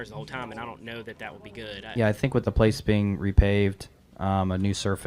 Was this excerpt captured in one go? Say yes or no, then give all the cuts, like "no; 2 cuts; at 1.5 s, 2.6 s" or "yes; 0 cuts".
no; 1 cut; at 1.8 s